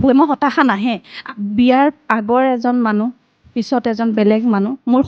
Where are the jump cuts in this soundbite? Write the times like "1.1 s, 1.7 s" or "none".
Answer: 1.1 s

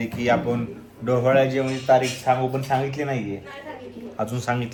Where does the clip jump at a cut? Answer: none

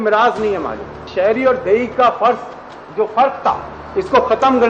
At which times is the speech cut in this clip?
1.0 s

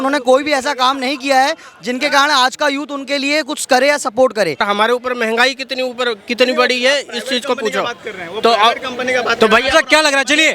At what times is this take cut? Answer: 4.6 s

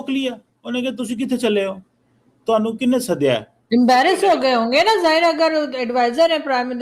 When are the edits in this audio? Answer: 3.6 s

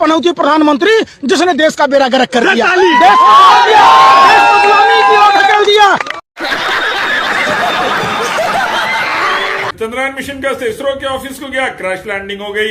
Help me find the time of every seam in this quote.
6.2 s, 9.7 s

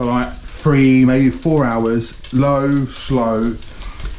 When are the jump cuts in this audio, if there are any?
none

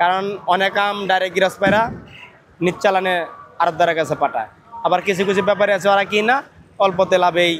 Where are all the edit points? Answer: none

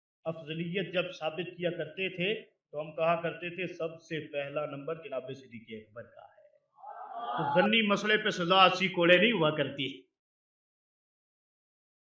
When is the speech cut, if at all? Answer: 7.6 s

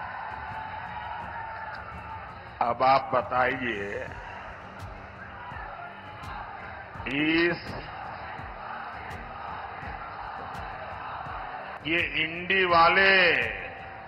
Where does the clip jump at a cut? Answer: 11.7 s

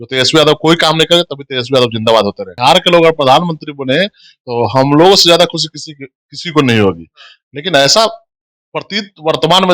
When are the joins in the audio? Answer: 2.5 s

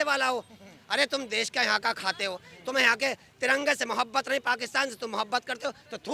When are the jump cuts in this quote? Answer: none

